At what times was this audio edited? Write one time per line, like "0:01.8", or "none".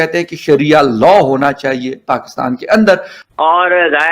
0:03.2